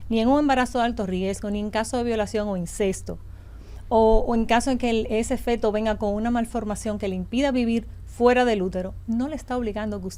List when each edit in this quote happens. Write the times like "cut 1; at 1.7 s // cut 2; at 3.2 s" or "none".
none